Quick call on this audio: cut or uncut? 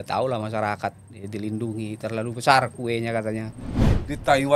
cut